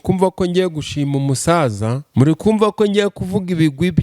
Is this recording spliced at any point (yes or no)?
yes